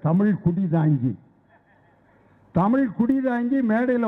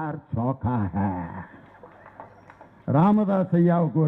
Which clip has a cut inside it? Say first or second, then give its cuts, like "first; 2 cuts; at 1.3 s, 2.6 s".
second; 1 cut; at 2.8 s